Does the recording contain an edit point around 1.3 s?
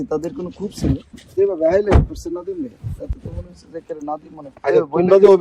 yes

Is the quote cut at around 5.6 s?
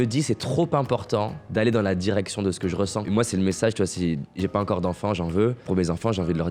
yes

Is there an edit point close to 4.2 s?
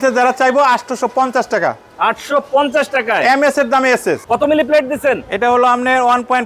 yes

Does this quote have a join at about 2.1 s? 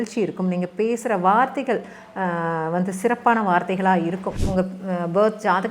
no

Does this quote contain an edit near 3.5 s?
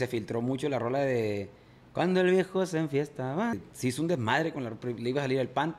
yes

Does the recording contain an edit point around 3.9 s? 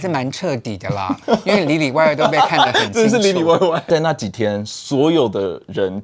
yes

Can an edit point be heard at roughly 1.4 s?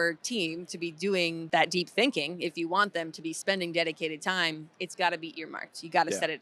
yes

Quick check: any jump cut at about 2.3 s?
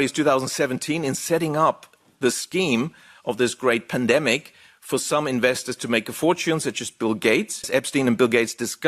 no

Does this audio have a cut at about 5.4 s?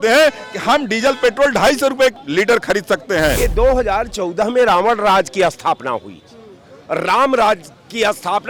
no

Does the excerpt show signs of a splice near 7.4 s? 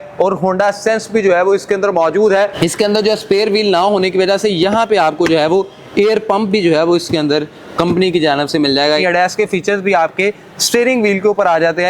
no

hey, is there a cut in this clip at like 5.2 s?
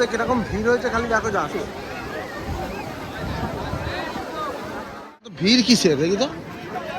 yes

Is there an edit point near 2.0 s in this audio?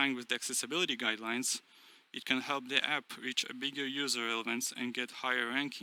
no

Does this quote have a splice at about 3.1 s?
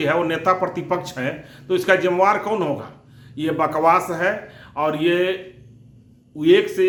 no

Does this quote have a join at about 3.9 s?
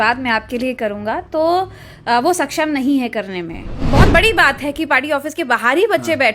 yes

